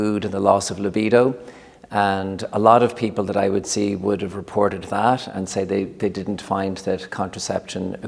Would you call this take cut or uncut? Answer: uncut